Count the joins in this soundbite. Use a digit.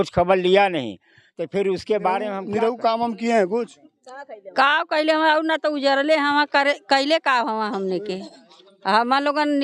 1